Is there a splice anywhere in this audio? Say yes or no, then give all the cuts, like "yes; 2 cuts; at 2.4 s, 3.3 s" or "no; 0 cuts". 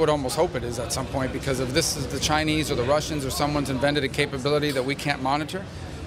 no; 0 cuts